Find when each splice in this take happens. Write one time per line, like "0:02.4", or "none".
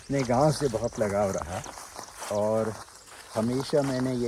none